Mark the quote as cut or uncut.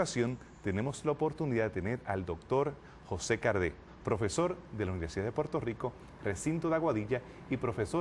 uncut